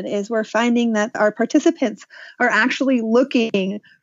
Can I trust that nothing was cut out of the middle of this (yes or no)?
no